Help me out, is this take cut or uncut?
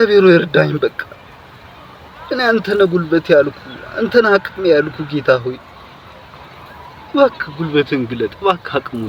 uncut